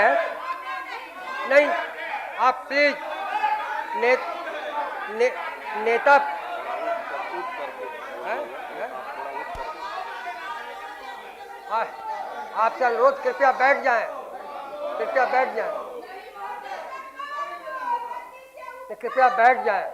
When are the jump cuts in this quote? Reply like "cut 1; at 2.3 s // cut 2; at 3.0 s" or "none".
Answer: none